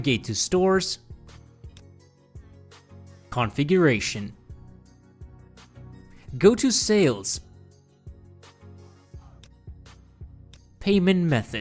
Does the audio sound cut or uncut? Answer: cut